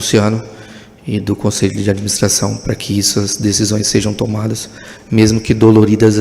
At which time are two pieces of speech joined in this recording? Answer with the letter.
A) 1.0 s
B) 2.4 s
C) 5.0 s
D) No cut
D